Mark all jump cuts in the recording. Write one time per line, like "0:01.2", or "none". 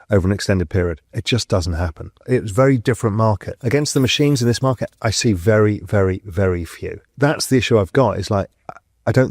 0:01.1
0:02.2
0:03.5
0:07.0